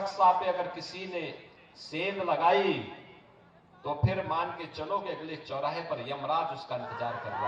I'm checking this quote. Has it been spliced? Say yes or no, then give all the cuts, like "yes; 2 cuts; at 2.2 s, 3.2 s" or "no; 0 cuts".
no; 0 cuts